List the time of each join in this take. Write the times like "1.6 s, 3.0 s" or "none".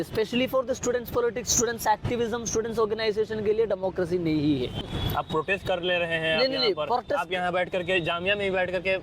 4.8 s

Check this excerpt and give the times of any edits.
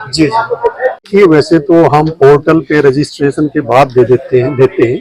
1.1 s

